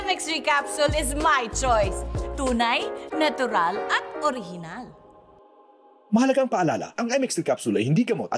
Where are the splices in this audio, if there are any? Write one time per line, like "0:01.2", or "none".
none